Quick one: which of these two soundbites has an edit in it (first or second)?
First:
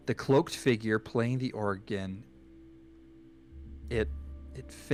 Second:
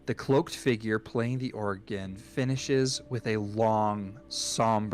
second